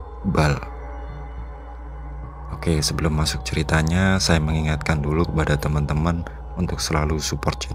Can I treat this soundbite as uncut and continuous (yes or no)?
no